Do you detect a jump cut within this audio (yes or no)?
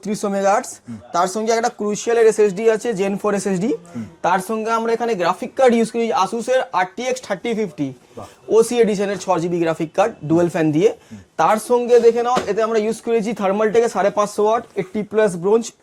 no